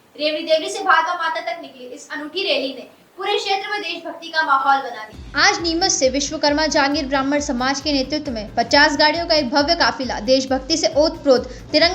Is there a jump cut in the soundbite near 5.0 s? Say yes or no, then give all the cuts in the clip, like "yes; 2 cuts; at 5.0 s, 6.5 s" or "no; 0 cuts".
yes; 1 cut; at 5.0 s